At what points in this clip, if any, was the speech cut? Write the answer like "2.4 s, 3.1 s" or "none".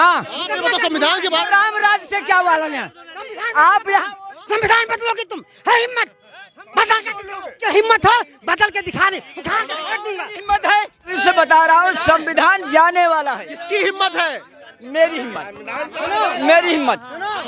7.6 s, 11.1 s

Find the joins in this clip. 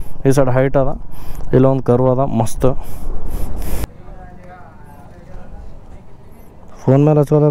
3.9 s

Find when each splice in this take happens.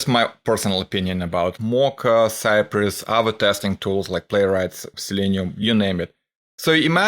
1.5 s, 4.9 s

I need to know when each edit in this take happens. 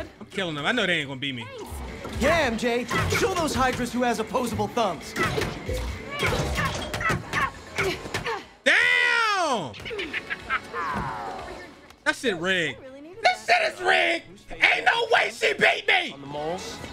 none

